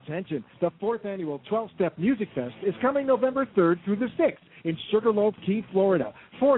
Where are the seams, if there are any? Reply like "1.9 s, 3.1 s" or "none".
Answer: none